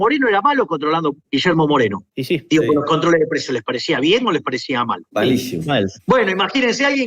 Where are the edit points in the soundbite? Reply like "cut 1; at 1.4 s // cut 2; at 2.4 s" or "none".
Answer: cut 1; at 1.2 s // cut 2; at 5.1 s